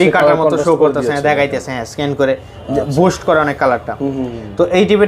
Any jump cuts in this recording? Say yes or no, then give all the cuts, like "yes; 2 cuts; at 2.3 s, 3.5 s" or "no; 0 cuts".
no; 0 cuts